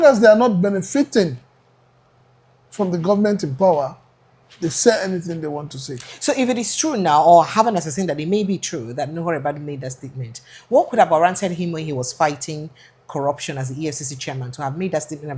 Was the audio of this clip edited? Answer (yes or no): no